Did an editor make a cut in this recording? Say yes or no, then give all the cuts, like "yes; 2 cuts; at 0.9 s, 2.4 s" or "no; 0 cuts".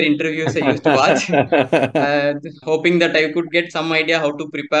yes; 1 cut; at 2.5 s